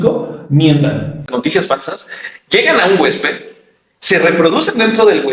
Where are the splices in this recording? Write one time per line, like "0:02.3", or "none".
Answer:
0:01.3